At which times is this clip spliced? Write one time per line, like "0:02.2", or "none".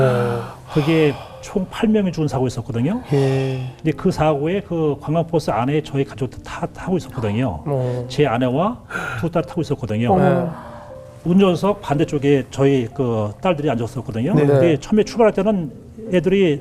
0:03.7
0:11.0